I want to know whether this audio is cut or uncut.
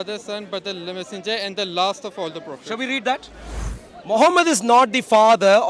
cut